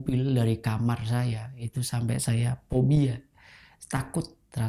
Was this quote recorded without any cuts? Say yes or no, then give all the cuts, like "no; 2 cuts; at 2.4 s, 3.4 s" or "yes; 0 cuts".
yes; 0 cuts